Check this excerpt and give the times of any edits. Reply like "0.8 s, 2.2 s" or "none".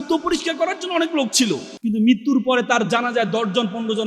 1.7 s

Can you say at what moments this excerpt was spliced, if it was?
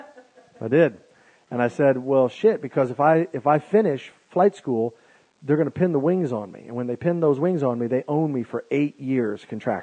8.5 s

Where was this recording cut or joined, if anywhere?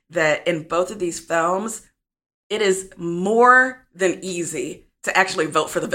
none

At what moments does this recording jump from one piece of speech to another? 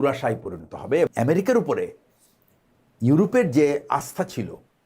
1.1 s

